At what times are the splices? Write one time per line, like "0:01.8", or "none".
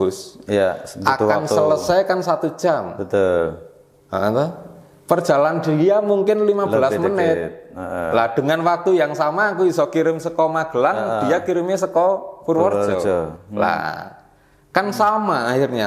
none